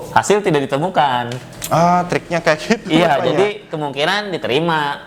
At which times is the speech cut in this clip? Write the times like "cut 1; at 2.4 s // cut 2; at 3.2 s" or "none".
none